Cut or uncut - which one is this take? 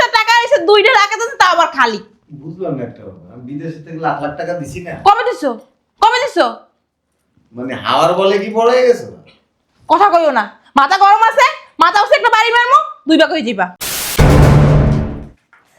cut